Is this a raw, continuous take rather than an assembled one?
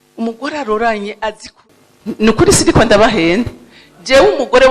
no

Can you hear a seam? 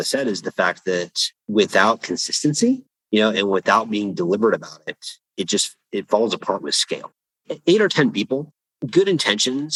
no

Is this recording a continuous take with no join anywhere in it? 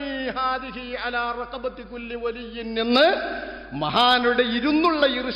yes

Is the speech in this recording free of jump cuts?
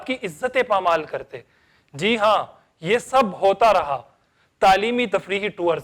yes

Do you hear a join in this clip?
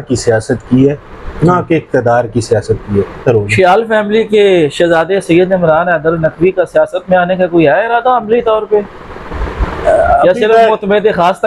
yes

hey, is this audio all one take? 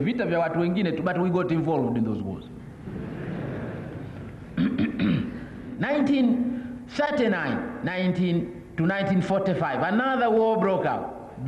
no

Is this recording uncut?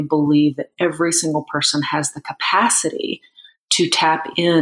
yes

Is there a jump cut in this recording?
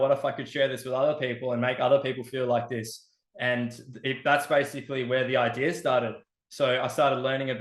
no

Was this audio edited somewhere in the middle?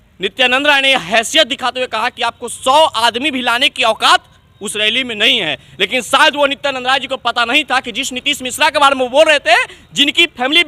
no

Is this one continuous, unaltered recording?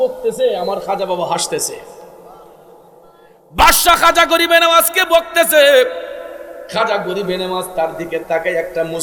yes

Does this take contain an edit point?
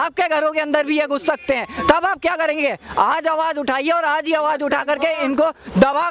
no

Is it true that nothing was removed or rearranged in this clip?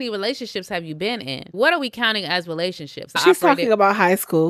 no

